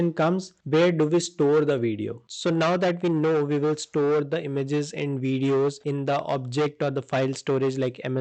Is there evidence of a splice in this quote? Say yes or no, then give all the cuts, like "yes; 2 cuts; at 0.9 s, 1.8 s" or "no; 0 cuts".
yes; 1 cut; at 2.1 s